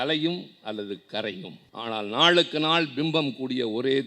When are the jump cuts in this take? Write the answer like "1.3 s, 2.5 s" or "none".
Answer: 1.6 s